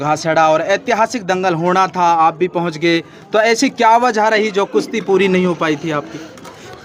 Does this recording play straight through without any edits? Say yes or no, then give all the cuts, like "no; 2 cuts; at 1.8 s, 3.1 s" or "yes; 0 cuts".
yes; 0 cuts